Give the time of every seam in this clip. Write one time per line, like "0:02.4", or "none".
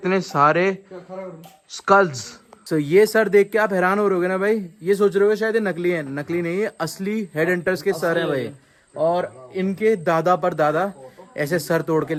none